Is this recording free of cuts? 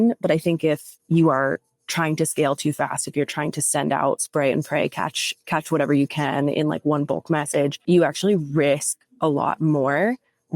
no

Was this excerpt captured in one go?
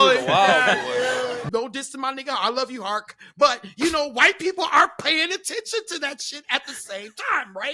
no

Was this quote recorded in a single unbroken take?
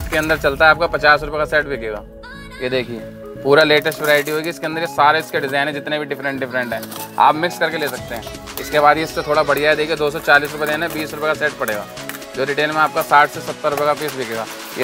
yes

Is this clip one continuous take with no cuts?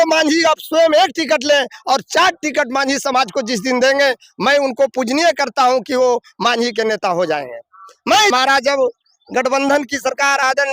no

